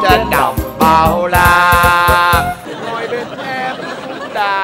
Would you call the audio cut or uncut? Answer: cut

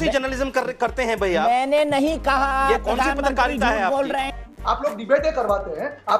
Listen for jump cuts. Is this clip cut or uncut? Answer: cut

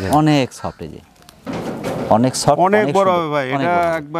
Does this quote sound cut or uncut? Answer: uncut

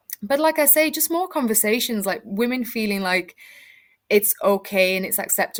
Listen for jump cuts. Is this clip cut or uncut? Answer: uncut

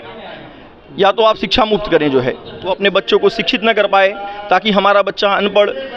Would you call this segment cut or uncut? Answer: cut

